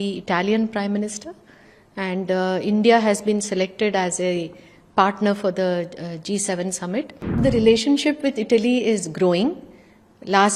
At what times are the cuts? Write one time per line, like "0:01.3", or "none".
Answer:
0:07.4